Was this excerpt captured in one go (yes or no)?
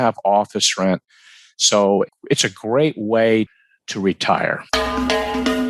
no